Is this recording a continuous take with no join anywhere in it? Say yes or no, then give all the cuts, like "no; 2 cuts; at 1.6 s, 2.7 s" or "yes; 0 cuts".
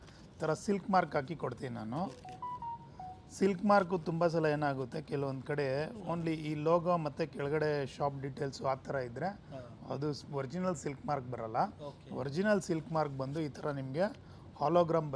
yes; 0 cuts